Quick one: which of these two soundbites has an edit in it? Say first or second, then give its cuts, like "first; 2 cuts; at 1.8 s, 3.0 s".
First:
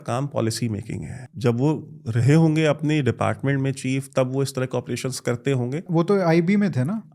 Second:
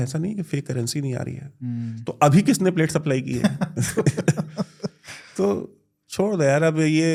first; 2 cuts; at 1.2 s, 5.9 s